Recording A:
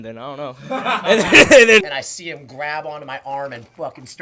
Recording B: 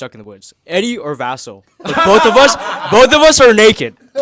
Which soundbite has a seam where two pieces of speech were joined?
A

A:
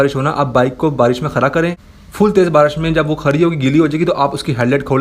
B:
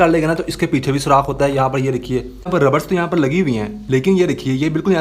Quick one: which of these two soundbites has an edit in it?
B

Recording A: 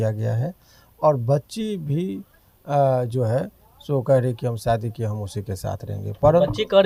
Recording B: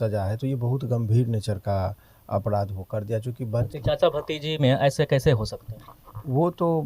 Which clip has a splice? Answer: B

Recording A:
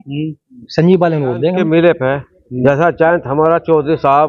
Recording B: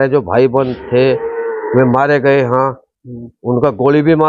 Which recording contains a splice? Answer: A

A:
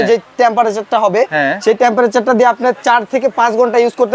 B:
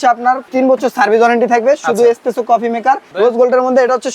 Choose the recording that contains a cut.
B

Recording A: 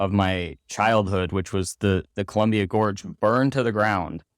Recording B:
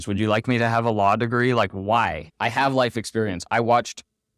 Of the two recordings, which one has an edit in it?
B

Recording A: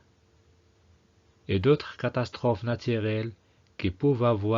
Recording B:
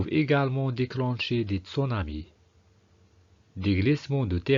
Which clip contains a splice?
A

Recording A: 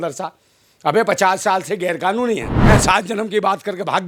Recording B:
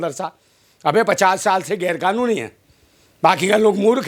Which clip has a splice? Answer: A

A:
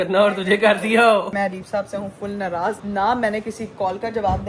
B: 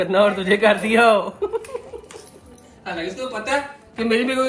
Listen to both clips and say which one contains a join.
A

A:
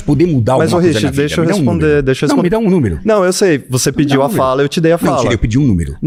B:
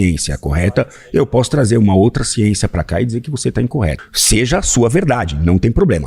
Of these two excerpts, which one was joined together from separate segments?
B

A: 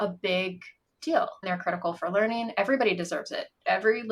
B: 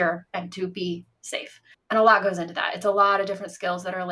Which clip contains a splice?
A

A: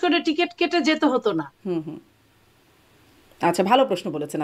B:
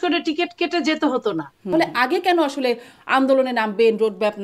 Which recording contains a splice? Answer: B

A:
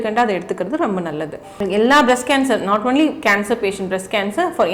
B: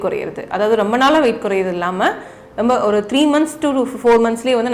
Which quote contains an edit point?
A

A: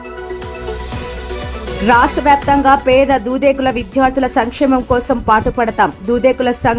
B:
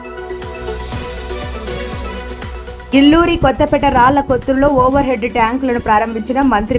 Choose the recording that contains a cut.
A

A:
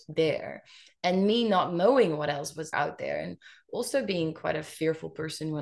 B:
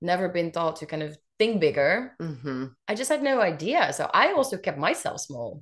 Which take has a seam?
A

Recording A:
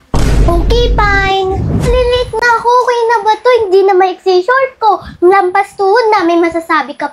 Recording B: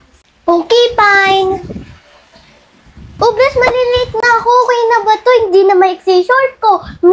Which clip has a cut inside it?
A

